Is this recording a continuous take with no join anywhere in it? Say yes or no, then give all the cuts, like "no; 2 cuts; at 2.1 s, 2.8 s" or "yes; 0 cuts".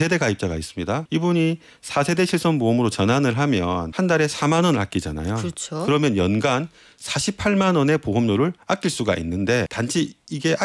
no; 3 cuts; at 1.0 s, 3.9 s, 9.7 s